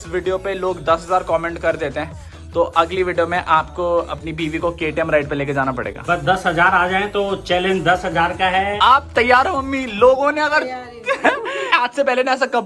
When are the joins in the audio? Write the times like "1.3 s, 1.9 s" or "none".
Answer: none